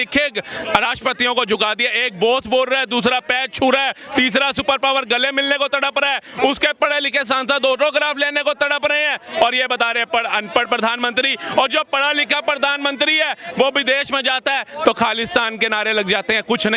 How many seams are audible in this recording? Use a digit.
0